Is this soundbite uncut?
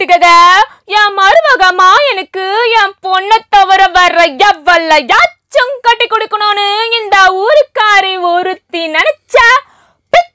yes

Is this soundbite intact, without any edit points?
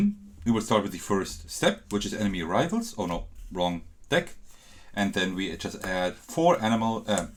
yes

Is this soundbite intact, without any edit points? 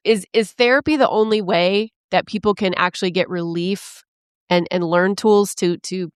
yes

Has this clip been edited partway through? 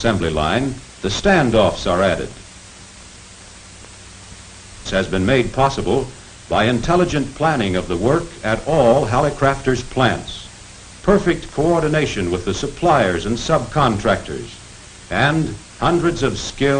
no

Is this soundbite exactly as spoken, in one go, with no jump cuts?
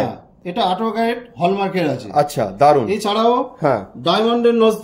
yes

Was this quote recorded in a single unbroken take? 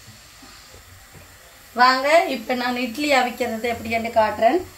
yes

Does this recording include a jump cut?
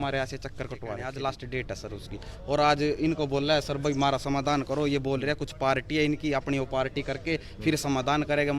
yes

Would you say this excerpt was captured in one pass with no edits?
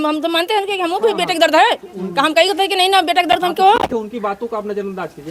yes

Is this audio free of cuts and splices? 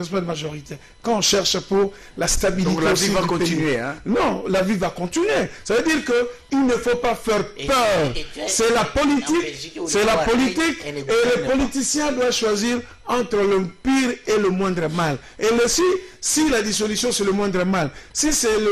yes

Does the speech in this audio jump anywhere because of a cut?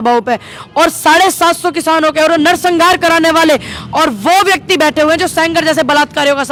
no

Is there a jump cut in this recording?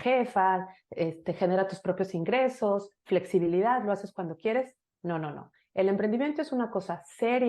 no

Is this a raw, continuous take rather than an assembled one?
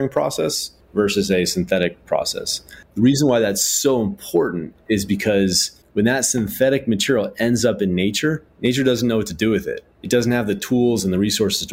yes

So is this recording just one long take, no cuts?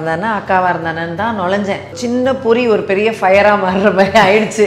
no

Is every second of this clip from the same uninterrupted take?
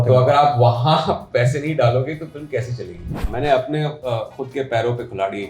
no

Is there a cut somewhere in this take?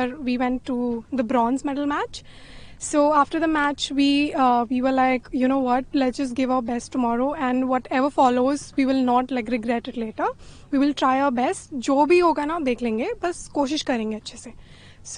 no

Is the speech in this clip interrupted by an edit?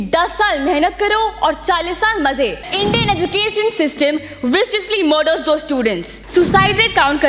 yes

